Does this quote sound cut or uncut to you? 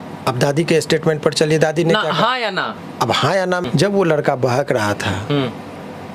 cut